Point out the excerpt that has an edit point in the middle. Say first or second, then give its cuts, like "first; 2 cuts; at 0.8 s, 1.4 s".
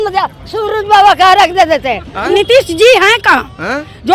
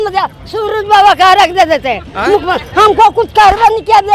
first; 1 cut; at 2.3 s